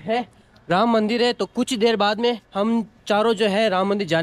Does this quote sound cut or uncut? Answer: uncut